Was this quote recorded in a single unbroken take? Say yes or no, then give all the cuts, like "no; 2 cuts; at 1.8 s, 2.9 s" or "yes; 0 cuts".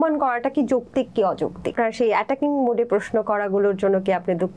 no; 1 cut; at 1.7 s